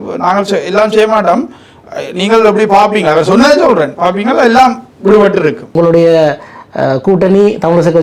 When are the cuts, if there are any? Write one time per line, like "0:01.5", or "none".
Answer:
0:05.6